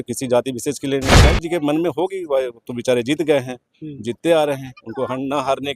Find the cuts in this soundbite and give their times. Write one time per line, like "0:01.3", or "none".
0:01.3

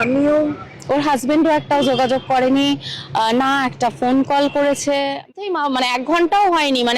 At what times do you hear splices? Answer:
0:05.3

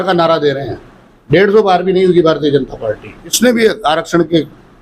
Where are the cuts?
0:03.4

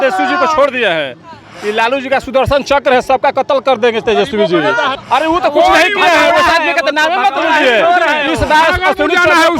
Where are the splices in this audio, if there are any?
0:05.0

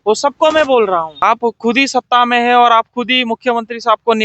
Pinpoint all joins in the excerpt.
0:01.1

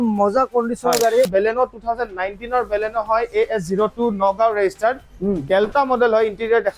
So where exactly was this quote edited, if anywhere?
0:01.3

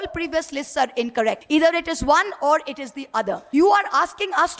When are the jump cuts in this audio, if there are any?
0:01.4
0:03.4

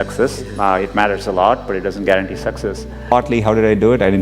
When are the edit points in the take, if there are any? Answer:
0:03.1

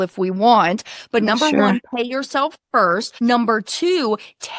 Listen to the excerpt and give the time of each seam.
0:03.1

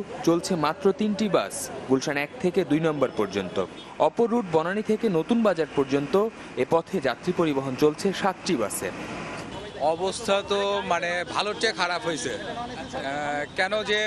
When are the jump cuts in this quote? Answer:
0:00.9

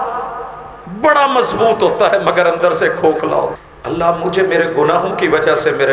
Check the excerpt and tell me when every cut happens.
0:03.5

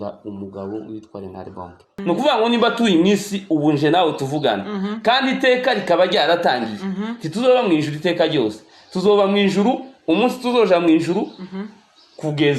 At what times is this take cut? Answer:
0:01.8

